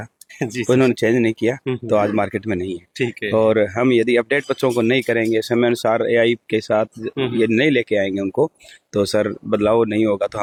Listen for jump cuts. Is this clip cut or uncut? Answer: uncut